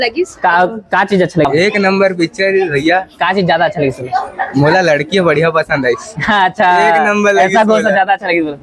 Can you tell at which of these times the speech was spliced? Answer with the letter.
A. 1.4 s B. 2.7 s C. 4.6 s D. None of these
A